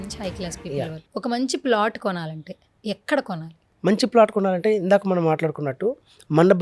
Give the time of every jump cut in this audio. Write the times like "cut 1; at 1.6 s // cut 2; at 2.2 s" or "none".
cut 1; at 1.0 s